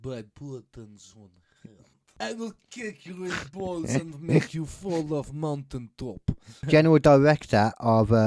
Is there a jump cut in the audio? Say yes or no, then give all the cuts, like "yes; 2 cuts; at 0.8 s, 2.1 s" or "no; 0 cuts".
yes; 2 cuts; at 2.1 s, 6.5 s